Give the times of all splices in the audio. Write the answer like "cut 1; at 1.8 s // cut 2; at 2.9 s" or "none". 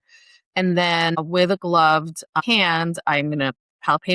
cut 1; at 1.2 s // cut 2; at 2.4 s